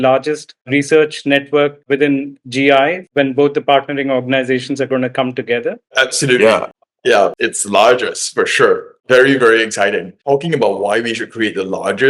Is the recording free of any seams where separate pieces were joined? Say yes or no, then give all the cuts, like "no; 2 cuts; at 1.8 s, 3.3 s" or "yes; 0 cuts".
no; 2 cuts; at 1.9 s, 10.1 s